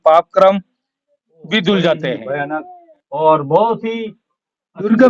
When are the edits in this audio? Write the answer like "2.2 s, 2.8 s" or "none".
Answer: 2.2 s